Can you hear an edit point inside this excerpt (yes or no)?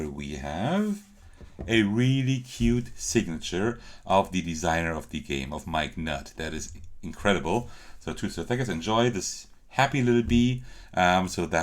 no